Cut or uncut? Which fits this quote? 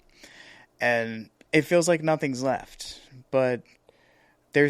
uncut